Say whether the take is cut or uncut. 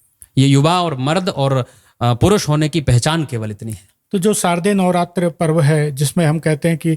uncut